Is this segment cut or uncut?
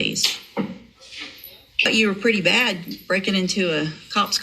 cut